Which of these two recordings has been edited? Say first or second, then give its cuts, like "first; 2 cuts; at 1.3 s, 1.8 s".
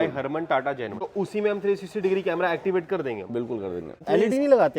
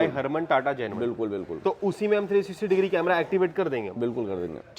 first; 2 cuts; at 1.0 s, 4.0 s